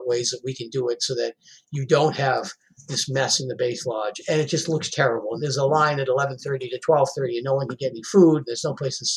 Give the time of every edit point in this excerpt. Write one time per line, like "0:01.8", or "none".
0:04.2
0:05.4